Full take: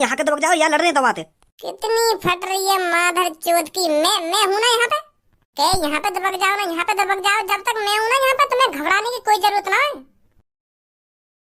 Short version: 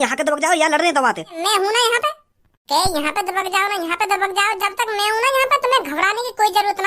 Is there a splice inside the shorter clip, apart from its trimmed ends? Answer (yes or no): yes